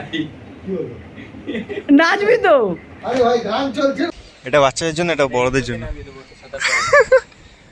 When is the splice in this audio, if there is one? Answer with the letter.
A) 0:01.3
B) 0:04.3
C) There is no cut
B